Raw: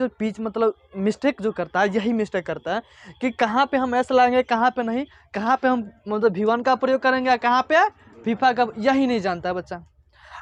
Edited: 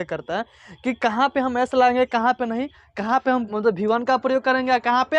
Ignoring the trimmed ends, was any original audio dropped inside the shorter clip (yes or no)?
yes